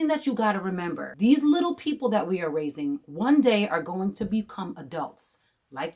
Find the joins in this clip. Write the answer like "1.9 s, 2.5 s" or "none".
1.0 s